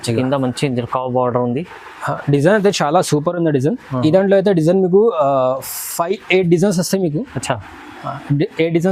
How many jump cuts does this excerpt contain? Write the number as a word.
zero